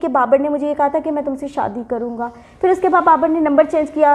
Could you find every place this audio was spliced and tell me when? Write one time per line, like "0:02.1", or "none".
none